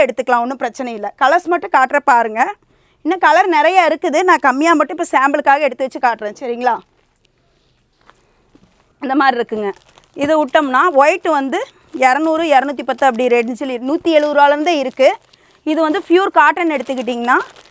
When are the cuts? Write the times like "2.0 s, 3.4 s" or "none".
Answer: none